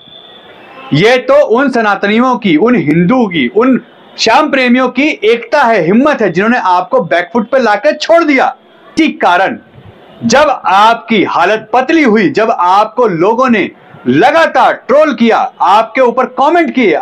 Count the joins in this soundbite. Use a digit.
1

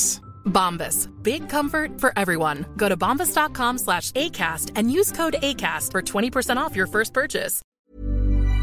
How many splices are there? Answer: 1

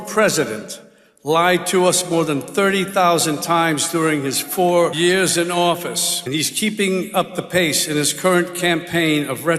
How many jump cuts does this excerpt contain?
2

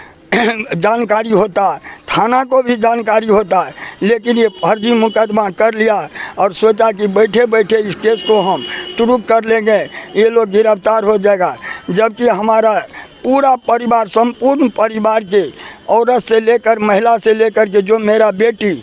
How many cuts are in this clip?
0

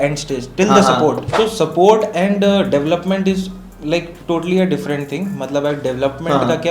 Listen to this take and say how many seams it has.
1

